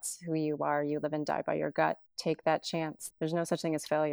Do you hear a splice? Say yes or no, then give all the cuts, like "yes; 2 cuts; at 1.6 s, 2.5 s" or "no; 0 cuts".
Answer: yes; 2 cuts; at 2.1 s, 2.9 s